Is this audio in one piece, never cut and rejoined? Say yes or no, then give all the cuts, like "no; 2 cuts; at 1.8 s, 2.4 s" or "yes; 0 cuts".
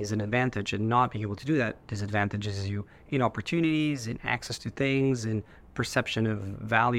yes; 0 cuts